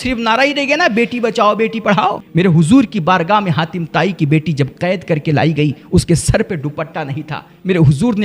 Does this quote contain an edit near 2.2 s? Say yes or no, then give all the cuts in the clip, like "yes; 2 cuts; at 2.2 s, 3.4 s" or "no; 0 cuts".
yes; 1 cut; at 2.2 s